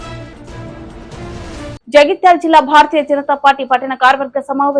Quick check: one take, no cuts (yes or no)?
no